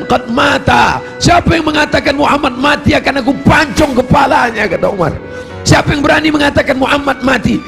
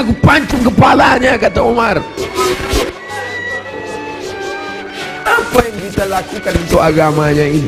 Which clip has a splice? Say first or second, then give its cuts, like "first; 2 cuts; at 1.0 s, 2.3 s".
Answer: second; 1 cut; at 2.2 s